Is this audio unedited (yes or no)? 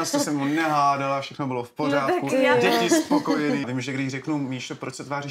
no